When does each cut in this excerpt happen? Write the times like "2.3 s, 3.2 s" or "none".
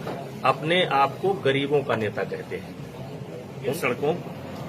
3.7 s